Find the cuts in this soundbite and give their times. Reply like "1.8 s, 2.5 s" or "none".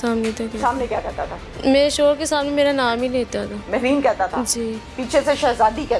1.5 s

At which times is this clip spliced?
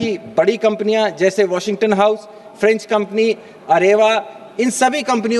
none

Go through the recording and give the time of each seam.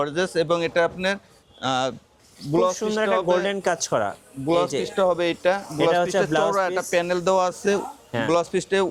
none

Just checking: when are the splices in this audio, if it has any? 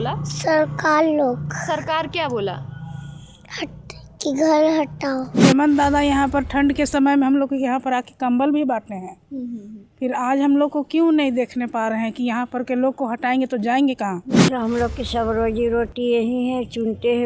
5.4 s, 14.5 s

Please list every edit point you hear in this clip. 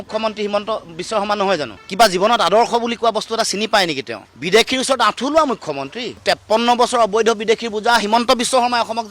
1.8 s, 4.2 s, 6.2 s

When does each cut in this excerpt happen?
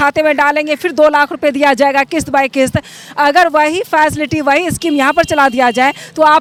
none

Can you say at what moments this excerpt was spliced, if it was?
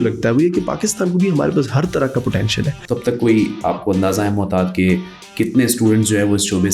2.8 s

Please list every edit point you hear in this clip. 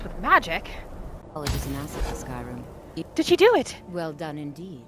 1.2 s

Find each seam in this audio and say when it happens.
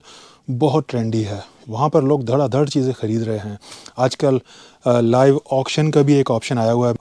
none

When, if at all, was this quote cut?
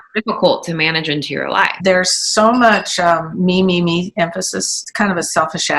1.8 s, 4.7 s

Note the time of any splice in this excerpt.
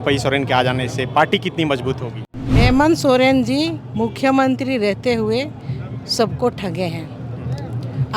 2.6 s

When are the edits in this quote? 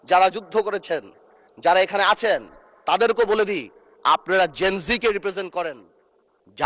none

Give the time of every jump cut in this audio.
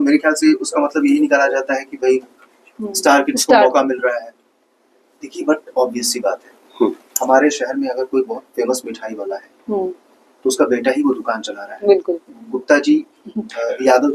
none

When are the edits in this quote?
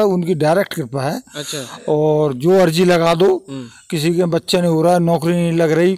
none

